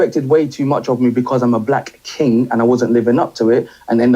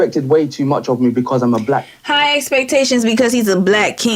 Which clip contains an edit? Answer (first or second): first